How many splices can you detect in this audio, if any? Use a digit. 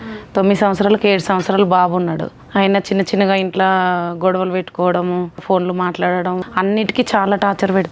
3